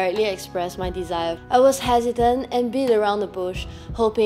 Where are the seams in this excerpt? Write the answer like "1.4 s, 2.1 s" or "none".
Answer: 1.4 s